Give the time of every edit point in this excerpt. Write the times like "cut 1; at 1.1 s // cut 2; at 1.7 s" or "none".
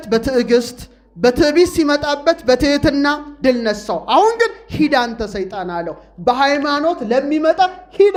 none